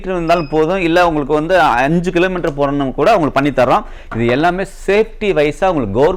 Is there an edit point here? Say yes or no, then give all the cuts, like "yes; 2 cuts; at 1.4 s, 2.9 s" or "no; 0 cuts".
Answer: no; 0 cuts